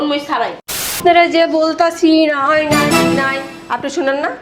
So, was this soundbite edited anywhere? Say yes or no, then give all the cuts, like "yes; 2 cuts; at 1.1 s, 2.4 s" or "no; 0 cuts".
yes; 1 cut; at 0.9 s